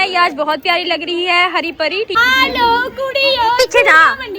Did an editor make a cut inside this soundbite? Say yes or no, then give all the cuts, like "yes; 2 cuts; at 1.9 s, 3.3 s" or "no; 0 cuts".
yes; 1 cut; at 2.2 s